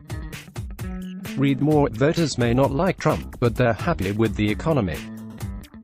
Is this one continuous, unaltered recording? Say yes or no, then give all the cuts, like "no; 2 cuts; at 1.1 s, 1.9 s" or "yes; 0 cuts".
yes; 0 cuts